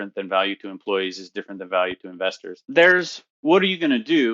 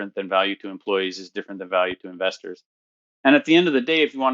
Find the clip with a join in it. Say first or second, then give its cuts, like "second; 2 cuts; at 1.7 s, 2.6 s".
first; 1 cut; at 2.5 s